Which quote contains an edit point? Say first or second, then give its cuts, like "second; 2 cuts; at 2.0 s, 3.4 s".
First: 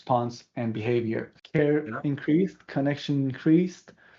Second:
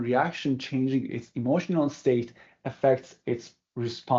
first; 1 cut; at 1.4 s